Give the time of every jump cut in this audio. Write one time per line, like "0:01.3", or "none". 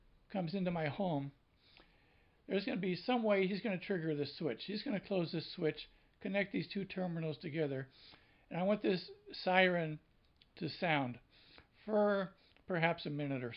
none